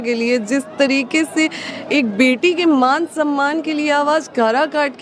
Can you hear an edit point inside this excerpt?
no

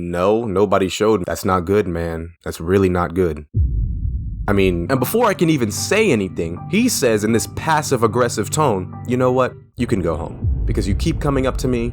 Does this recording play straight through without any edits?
no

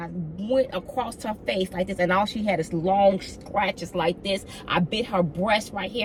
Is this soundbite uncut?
yes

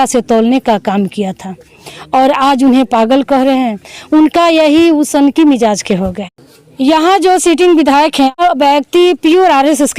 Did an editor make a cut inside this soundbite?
yes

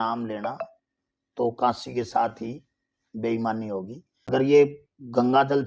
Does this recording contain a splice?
yes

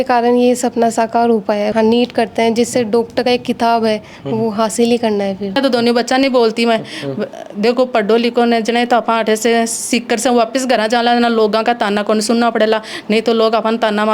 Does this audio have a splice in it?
yes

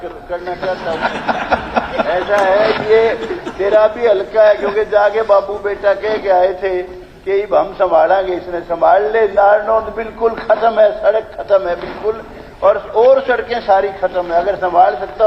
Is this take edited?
no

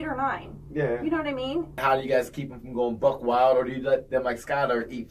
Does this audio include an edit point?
yes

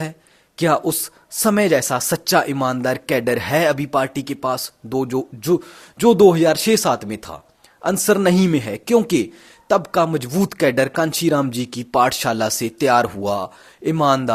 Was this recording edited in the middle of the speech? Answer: no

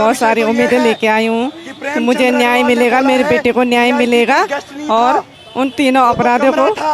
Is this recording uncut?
yes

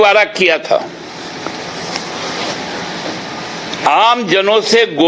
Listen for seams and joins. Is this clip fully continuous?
yes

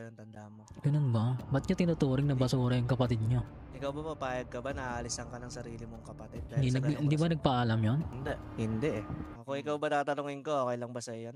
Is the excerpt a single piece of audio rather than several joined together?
yes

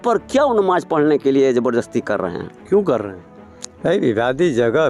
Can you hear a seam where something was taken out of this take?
no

